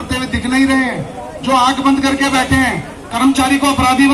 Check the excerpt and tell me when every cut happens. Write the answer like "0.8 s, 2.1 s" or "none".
none